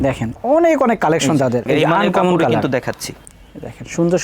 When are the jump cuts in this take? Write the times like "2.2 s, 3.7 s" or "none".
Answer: 1.6 s

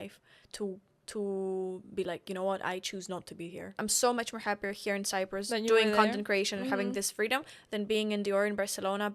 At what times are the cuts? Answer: 3.7 s

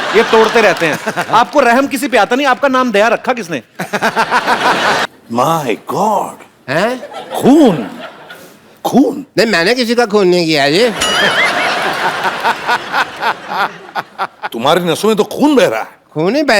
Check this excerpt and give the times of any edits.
5.0 s

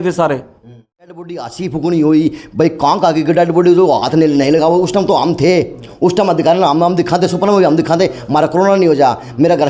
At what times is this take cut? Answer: 1.1 s

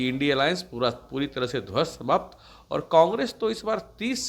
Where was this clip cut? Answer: none

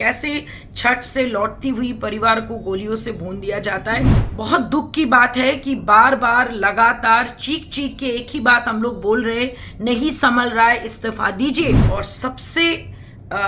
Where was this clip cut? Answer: 4.2 s, 11.8 s

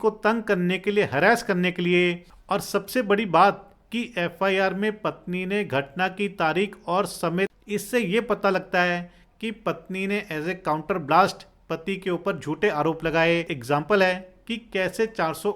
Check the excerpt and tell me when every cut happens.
2.3 s, 7.5 s, 13.5 s

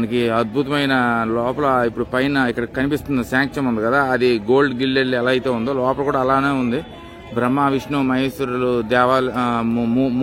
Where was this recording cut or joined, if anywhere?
none

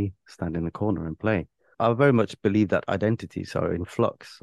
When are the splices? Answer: 1.8 s

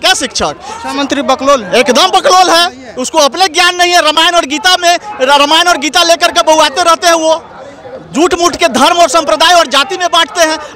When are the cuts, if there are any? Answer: none

